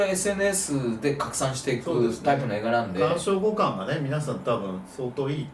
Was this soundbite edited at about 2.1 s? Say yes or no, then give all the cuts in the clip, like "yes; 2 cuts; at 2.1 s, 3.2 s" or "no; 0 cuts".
no; 0 cuts